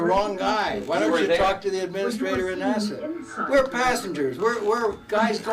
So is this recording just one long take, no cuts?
yes; 0 cuts

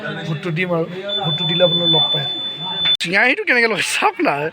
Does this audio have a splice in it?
yes; 1 cut; at 3.0 s

